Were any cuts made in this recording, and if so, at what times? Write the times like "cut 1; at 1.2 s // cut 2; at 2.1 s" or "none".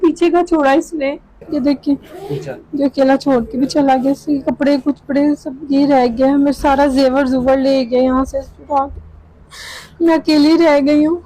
cut 1; at 1.3 s